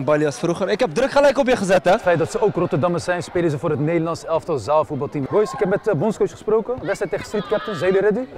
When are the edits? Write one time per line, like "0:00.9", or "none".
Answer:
0:02.0
0:05.2